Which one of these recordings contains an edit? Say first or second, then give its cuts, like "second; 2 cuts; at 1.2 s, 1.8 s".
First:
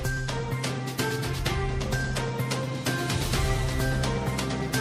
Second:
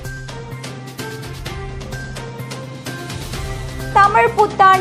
first; 1 cut; at 3.9 s